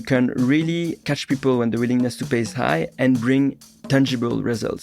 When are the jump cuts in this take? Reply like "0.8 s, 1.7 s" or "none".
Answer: 1.1 s